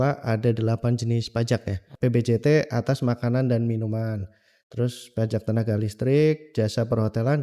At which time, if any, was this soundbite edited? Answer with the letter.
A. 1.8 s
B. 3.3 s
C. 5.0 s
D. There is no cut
A